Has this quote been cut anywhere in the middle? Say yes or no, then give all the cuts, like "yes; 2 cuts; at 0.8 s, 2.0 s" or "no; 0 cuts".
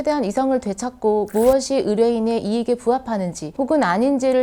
no; 0 cuts